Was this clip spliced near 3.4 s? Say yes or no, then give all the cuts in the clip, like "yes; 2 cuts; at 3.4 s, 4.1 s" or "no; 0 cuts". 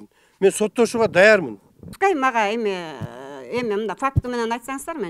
no; 1 cut; at 1.8 s